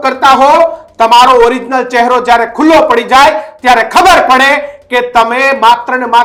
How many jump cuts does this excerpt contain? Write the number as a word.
zero